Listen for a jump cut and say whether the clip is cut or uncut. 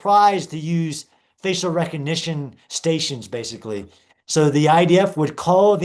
uncut